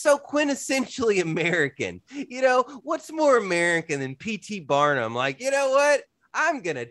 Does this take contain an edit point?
no; 0 cuts

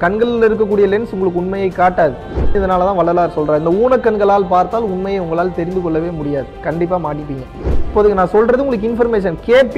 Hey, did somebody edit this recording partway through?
yes; 2 cuts; at 2.6 s, 7.8 s

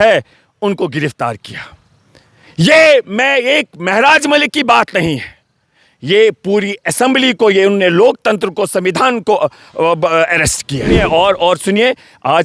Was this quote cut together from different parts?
yes; 1 cut; at 11.0 s

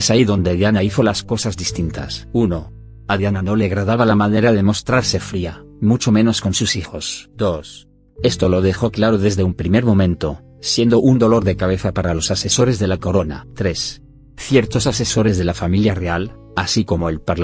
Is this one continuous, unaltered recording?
no; 1 cut; at 10.9 s

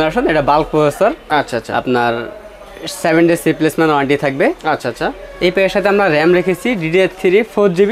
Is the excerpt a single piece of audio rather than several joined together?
yes; 0 cuts

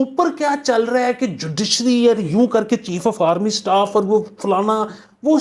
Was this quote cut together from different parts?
no; 0 cuts

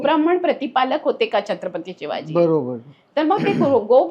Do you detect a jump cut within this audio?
no; 0 cuts

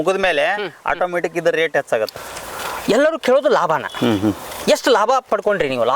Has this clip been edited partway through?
yes; 1 cut; at 2.2 s

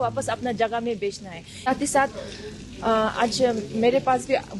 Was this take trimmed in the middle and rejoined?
yes; 1 cut; at 1.7 s

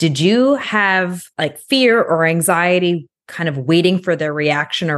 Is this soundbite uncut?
no; 1 cut; at 1.2 s

